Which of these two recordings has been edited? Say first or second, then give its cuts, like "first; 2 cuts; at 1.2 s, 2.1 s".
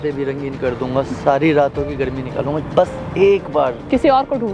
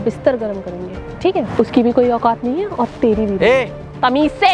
second; 1 cut; at 1.5 s